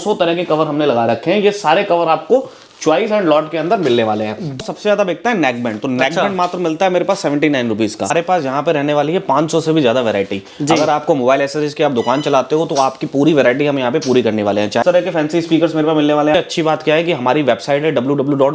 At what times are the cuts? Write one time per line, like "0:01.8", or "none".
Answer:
0:04.6
0:08.1
0:14.8
0:16.3